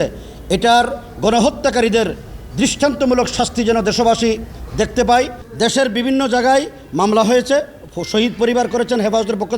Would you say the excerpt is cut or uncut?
cut